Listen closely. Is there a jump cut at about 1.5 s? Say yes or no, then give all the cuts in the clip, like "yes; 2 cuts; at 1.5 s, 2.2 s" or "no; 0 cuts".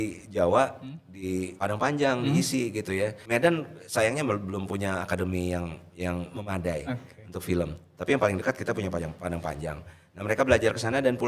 yes; 2 cuts; at 1.5 s, 3.2 s